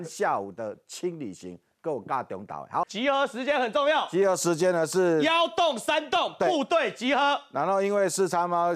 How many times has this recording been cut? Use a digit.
1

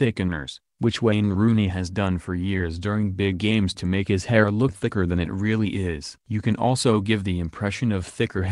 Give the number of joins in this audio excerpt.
1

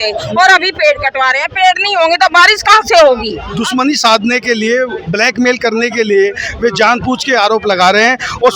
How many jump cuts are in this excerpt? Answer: 1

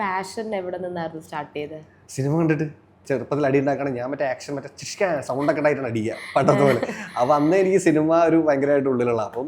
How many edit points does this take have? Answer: 1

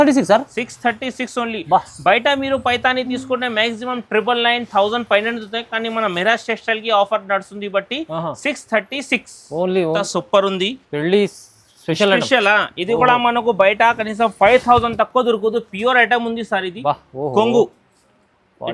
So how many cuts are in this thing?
1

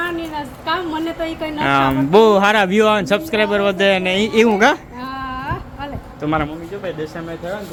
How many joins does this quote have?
0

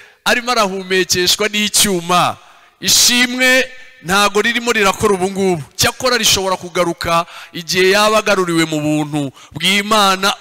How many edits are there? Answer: 0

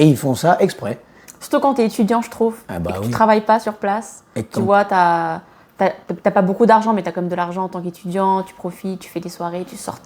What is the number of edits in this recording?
0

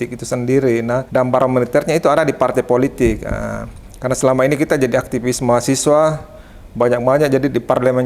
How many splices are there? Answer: 1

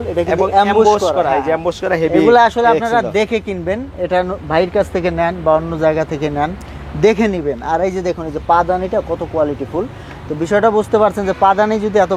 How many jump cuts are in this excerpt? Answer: 0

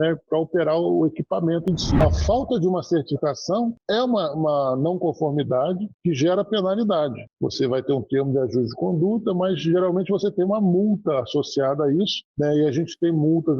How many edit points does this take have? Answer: 1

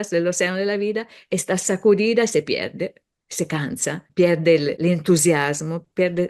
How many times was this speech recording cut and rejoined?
2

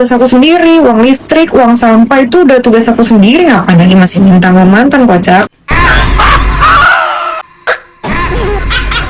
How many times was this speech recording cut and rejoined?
1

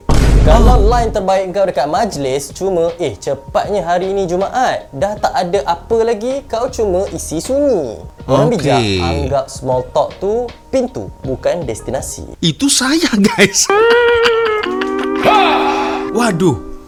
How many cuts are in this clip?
0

